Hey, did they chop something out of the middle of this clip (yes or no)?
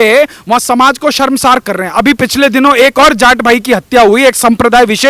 no